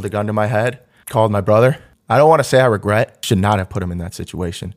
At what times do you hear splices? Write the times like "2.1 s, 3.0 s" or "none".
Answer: 0.9 s, 1.9 s, 3.2 s